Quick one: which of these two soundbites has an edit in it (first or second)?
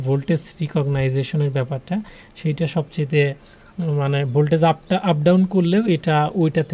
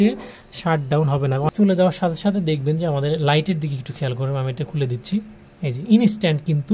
second